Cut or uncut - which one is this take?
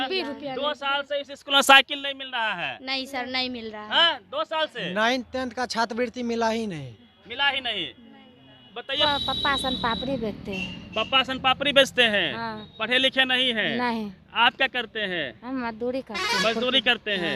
cut